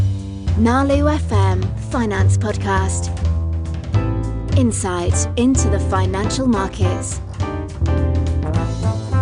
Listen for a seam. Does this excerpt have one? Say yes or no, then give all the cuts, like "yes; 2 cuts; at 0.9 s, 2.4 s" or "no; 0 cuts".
no; 0 cuts